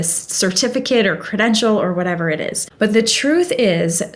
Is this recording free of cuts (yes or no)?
no